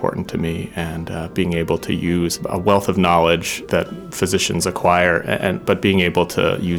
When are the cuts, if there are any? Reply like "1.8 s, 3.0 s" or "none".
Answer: 2.4 s, 3.6 s